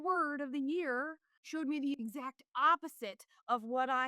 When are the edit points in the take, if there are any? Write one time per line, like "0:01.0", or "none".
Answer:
0:01.5